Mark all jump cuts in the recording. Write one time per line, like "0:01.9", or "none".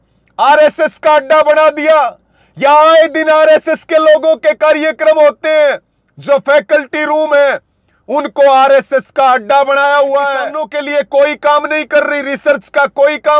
0:10.6